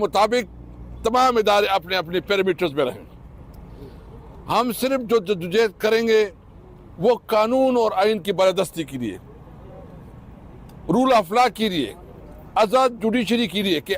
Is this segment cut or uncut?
uncut